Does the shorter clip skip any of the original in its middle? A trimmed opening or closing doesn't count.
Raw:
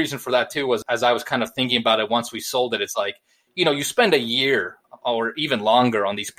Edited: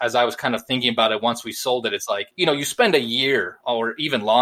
yes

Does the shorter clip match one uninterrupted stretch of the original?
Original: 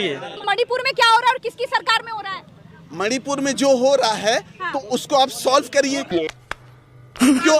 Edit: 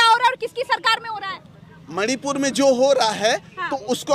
yes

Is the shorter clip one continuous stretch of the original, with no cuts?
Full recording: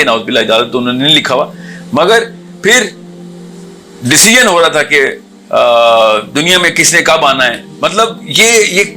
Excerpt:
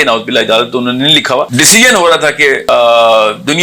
no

